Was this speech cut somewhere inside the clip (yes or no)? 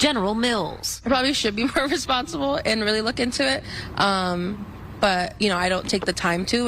no